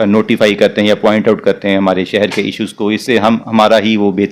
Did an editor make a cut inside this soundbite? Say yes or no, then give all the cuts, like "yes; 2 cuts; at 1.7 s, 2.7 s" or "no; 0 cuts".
no; 0 cuts